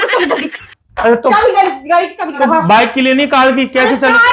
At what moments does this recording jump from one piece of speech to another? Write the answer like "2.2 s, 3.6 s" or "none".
1.4 s, 2.4 s

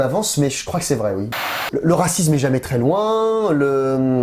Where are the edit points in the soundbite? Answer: 1.3 s

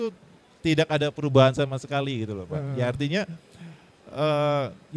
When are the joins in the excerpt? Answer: none

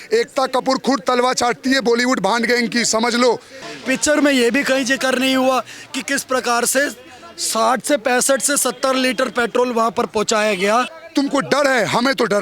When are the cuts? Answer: 3.5 s, 11.0 s

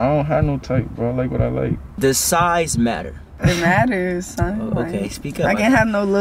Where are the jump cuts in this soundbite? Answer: 1.9 s, 3.2 s

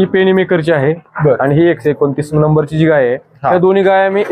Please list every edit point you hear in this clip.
none

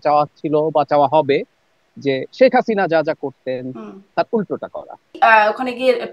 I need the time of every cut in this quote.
5.2 s

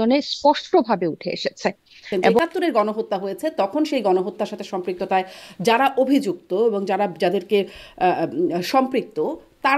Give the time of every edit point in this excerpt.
2.4 s

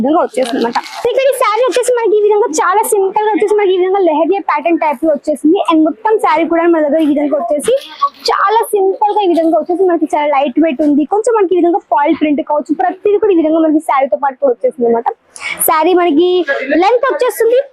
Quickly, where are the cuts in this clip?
0.9 s

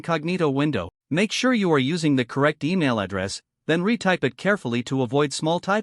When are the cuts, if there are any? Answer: 1.0 s

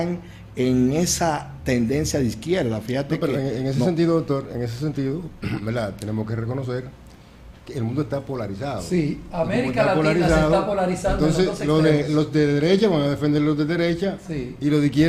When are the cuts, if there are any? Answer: none

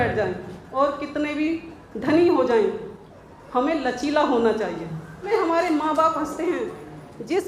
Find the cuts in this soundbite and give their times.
5.3 s

